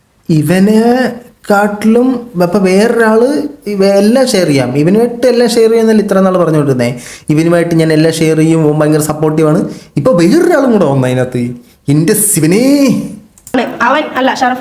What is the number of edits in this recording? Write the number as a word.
one